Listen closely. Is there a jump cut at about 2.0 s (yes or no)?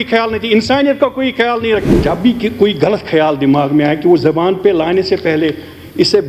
yes